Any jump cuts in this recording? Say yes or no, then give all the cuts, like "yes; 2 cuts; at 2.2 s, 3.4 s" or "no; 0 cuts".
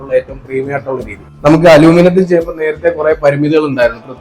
yes; 1 cut; at 1.4 s